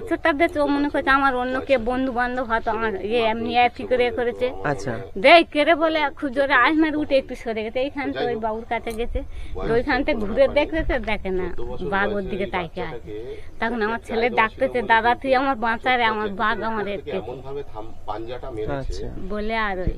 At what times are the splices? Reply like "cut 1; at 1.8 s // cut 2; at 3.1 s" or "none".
none